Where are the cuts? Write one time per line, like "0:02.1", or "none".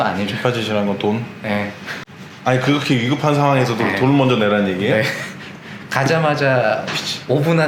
none